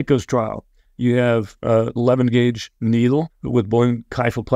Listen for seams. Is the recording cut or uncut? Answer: cut